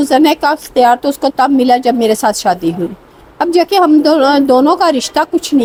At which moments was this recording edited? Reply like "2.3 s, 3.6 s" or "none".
none